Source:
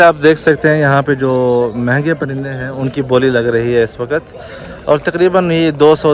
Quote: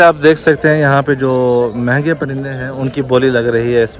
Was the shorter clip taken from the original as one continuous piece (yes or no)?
yes